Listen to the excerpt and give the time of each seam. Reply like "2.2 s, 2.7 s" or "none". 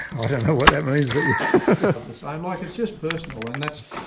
2.0 s